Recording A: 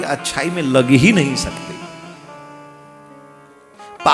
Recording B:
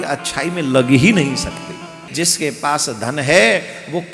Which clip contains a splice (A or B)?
B